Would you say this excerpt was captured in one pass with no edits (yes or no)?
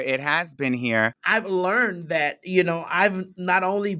no